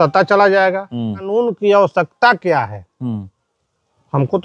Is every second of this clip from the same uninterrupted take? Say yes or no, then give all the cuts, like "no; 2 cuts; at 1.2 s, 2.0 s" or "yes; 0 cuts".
no; 1 cut; at 1.2 s